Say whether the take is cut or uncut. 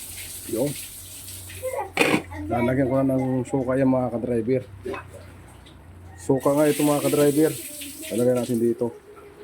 uncut